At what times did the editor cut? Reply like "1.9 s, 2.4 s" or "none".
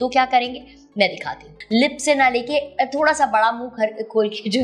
1.5 s